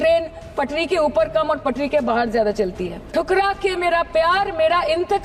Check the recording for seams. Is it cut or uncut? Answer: cut